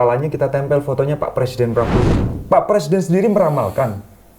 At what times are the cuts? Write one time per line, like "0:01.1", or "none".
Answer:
0:02.2